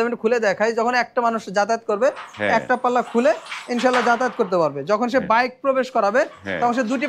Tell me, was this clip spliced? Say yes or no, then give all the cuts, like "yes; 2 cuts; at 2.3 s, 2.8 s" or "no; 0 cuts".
no; 0 cuts